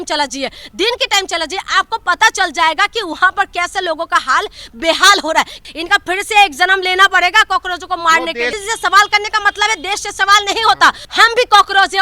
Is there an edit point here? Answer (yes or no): yes